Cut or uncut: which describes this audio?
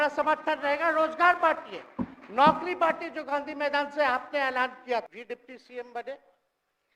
cut